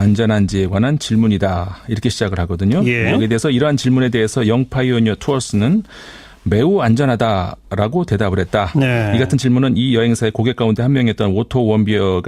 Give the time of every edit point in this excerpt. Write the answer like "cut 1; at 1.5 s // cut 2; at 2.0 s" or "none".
cut 1; at 5.2 s